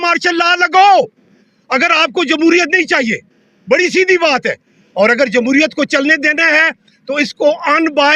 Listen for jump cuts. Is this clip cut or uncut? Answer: uncut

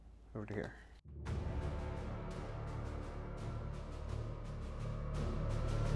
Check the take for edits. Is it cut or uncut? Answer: cut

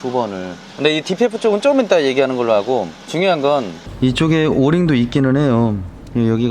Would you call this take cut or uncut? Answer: cut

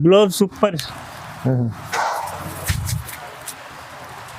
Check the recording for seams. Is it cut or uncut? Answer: uncut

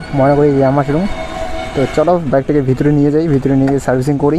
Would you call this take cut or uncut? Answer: uncut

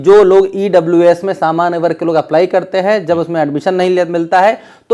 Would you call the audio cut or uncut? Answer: uncut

